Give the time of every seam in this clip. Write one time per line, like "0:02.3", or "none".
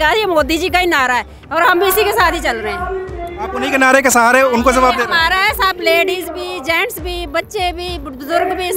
none